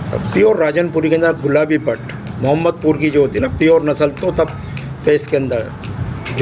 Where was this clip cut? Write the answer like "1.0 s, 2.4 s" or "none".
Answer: none